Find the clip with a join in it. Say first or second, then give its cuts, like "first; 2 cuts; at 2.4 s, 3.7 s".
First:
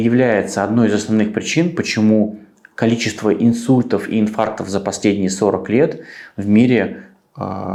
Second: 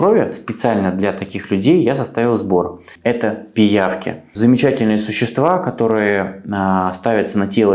second; 2 cuts; at 2.9 s, 4.3 s